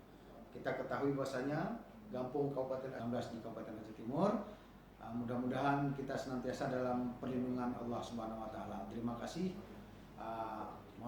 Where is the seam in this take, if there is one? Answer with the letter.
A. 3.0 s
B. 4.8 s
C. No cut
A